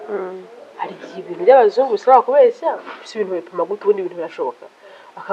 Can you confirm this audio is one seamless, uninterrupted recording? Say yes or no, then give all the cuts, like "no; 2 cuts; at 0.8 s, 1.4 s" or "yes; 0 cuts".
yes; 0 cuts